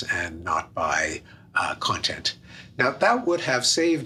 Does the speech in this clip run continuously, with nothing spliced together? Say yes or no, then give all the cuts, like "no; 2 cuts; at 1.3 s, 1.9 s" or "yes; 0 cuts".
yes; 0 cuts